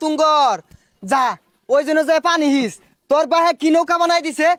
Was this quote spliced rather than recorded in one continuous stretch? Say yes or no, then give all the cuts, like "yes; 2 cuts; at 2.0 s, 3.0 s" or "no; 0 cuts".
no; 0 cuts